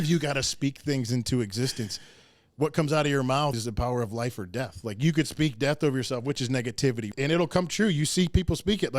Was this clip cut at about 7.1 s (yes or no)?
yes